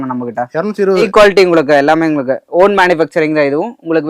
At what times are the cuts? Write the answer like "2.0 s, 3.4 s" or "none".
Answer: 1.1 s